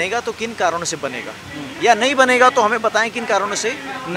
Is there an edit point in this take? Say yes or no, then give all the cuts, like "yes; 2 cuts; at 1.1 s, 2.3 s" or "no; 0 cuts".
no; 0 cuts